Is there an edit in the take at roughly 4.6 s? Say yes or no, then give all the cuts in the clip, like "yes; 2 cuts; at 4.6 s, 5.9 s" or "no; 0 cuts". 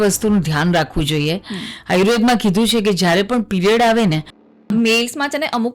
yes; 1 cut; at 4.6 s